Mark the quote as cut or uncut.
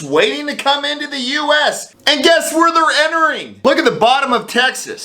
cut